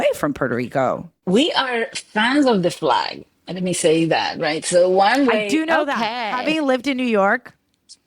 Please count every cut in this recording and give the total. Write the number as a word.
one